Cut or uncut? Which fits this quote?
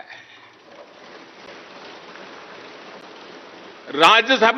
uncut